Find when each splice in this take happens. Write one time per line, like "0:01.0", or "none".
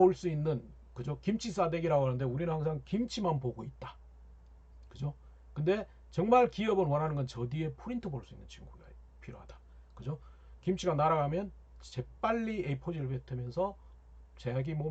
none